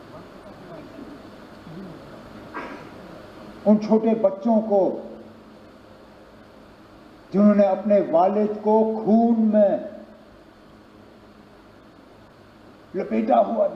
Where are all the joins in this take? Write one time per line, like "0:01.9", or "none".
none